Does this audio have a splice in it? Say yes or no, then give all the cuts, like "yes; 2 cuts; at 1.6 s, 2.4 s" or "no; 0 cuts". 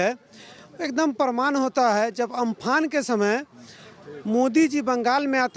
no; 0 cuts